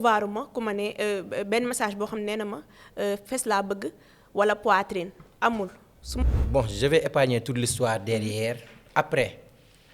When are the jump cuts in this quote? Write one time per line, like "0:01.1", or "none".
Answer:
0:06.2